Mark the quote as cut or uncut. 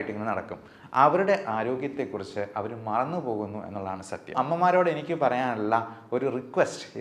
cut